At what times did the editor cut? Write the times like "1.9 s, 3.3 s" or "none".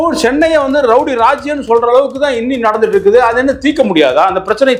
none

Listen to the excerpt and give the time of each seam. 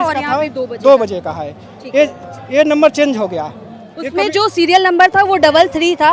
none

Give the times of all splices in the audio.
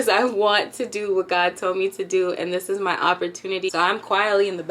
3.7 s

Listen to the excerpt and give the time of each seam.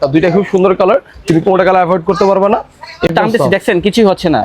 3.1 s

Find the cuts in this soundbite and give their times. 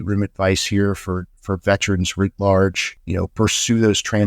2.9 s

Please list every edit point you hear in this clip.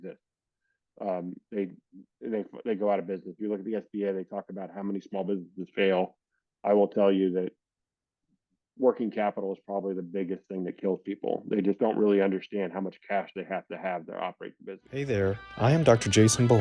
14.9 s

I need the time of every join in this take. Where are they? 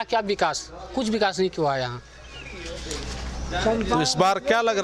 none

